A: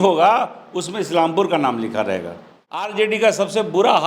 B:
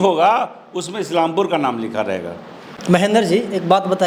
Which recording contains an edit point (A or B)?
A